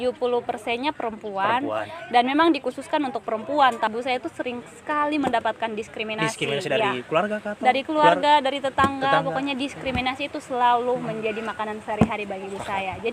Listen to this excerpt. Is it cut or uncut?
cut